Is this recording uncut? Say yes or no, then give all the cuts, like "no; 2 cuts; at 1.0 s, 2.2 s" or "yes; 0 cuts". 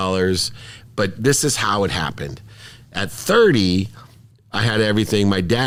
yes; 0 cuts